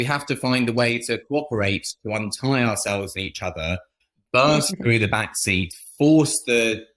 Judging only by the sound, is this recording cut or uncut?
cut